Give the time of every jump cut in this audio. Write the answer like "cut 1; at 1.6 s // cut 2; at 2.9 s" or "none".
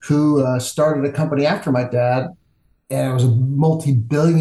none

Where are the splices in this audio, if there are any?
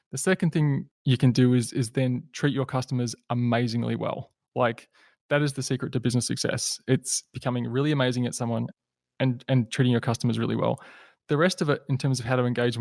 cut 1; at 0.9 s

